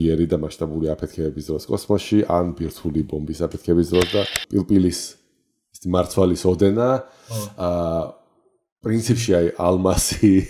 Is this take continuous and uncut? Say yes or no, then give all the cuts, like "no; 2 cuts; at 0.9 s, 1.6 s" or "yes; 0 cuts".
no; 1 cut; at 4.4 s